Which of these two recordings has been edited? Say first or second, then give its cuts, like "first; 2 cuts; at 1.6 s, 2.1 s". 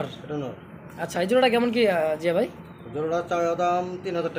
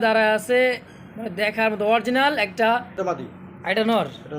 second; 1 cut; at 3.0 s